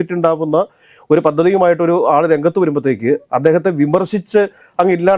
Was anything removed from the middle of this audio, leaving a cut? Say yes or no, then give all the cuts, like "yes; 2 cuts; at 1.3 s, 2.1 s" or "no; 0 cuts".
no; 0 cuts